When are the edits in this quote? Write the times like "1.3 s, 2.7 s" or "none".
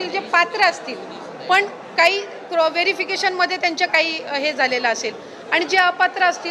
none